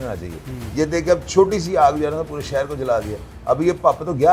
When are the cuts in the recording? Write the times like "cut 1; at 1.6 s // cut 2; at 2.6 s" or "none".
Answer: none